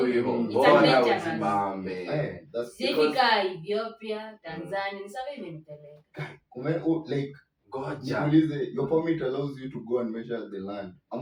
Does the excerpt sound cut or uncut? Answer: uncut